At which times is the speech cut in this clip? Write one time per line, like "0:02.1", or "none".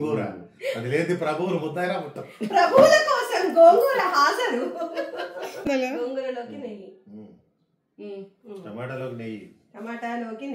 0:05.7